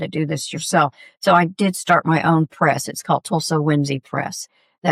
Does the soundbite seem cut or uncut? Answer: uncut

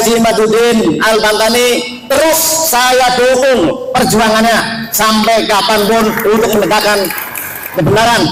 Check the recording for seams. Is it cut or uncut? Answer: uncut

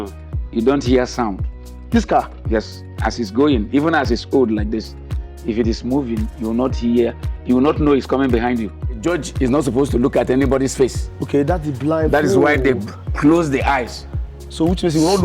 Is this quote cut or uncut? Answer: cut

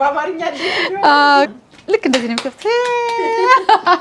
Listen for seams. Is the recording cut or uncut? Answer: cut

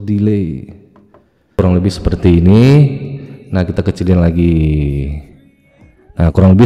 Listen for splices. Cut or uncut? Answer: cut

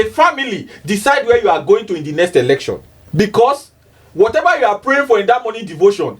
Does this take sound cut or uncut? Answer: cut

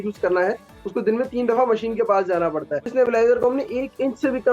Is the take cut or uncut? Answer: cut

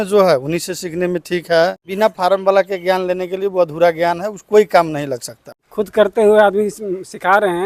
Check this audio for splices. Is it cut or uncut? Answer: cut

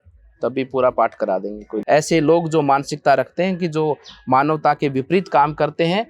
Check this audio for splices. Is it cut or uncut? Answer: cut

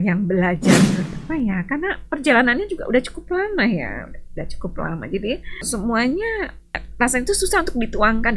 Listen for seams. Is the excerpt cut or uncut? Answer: cut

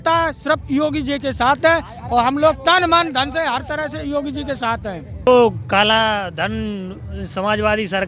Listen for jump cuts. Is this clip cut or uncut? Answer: cut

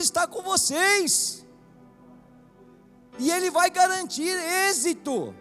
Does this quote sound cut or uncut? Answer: uncut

